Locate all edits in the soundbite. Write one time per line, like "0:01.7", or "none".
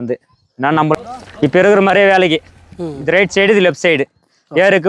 0:00.9